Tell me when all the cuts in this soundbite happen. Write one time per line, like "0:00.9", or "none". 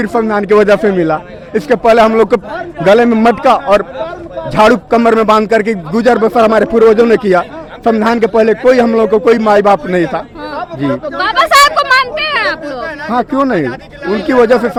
none